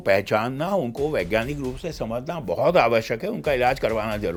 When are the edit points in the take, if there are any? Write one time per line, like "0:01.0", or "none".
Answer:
none